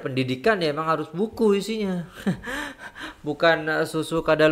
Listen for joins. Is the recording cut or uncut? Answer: uncut